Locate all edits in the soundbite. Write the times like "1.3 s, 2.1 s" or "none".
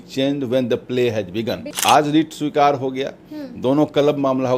1.7 s